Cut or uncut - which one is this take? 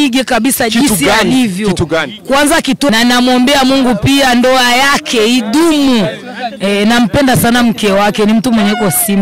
cut